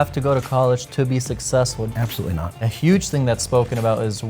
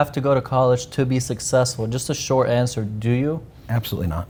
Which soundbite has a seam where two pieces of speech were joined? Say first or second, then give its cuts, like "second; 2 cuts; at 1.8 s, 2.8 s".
first; 1 cut; at 2.1 s